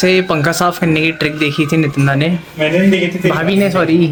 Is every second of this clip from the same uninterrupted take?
yes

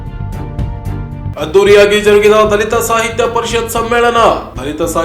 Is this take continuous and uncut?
no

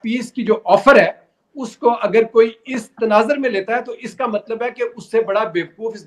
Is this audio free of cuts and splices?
yes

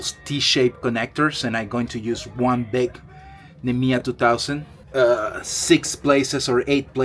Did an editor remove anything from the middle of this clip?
no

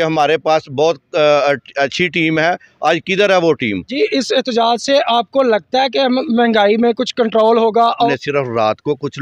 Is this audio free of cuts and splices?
no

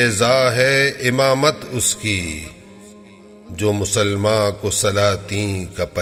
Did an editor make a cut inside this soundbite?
no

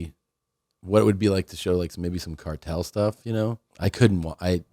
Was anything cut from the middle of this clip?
yes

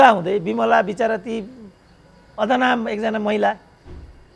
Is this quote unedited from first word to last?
yes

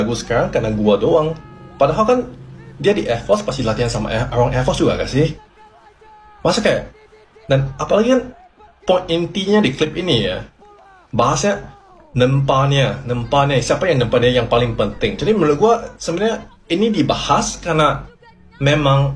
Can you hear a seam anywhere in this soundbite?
no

